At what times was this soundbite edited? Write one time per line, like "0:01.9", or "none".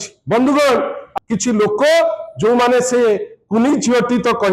0:01.0

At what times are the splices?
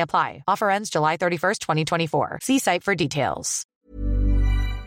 0:03.8

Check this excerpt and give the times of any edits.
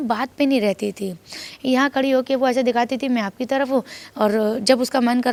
none

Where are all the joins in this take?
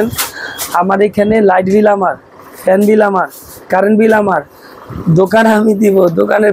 none

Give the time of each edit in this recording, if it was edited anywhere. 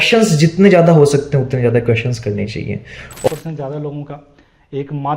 0:03.3

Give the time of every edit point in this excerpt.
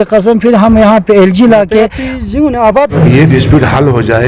0:02.9

